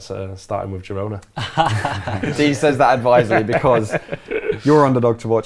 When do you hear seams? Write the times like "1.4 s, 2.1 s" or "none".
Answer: 2.2 s